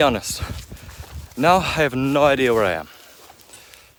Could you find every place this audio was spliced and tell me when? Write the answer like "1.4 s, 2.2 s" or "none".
none